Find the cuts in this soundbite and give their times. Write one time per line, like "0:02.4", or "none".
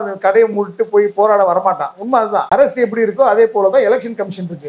0:02.4